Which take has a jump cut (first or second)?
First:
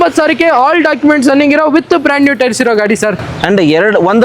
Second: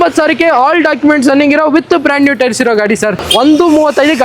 second